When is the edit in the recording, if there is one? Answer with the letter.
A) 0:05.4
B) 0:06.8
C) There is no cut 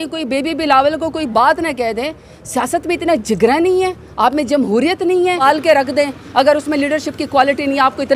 A